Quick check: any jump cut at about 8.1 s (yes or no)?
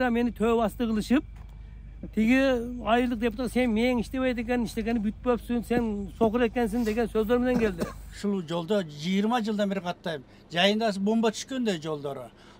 yes